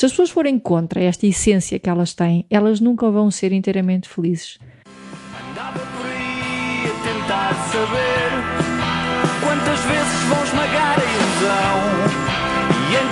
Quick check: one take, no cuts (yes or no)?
no